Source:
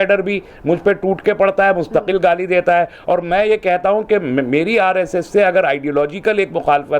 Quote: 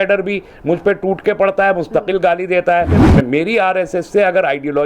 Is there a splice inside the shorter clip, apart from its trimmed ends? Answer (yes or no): yes